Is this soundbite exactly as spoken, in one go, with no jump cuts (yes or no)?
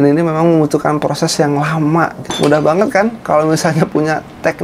no